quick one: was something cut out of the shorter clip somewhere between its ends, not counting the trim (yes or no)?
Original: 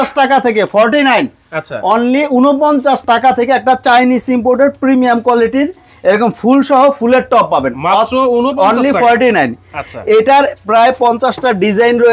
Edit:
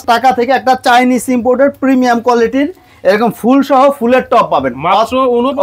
no